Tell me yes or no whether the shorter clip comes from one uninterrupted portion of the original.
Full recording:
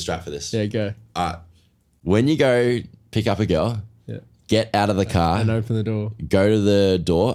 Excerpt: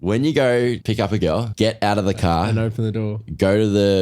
no